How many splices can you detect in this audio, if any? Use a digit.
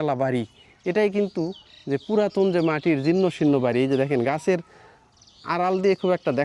0